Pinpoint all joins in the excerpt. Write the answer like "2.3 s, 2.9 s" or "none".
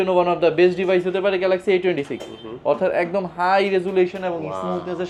none